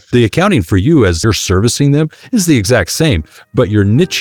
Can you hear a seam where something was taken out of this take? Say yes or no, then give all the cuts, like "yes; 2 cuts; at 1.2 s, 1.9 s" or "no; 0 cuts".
yes; 1 cut; at 1.2 s